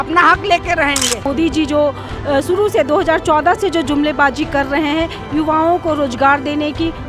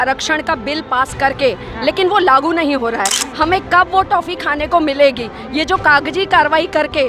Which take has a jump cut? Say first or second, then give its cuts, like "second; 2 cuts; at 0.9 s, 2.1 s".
first; 1 cut; at 1.3 s